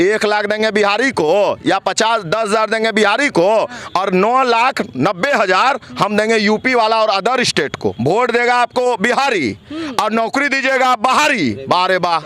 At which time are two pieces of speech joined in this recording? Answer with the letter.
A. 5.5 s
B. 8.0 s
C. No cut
B